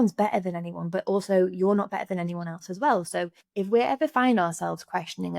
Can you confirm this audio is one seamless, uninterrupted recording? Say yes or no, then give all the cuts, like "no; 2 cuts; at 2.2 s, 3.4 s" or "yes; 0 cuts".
no; 1 cut; at 3.4 s